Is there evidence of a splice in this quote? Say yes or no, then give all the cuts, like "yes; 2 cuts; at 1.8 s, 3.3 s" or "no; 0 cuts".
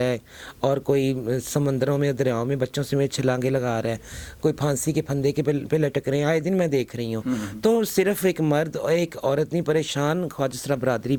no; 0 cuts